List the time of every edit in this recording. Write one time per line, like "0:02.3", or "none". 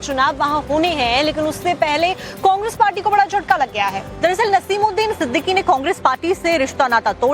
0:05.4